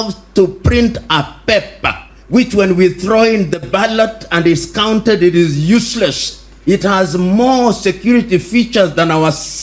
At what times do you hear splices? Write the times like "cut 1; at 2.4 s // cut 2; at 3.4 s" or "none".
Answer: none